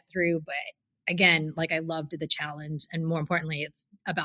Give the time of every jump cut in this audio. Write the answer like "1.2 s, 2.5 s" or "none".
none